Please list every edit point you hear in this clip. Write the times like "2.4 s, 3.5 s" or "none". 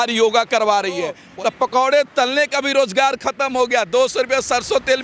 1.2 s